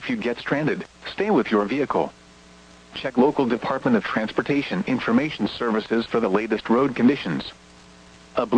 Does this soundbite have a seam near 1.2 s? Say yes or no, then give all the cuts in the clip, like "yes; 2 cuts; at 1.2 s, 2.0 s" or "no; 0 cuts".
yes; 1 cut; at 1.2 s